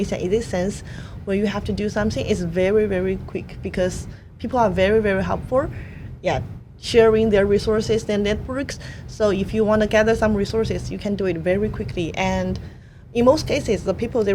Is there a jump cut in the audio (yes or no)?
no